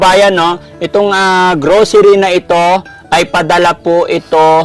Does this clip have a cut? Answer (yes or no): no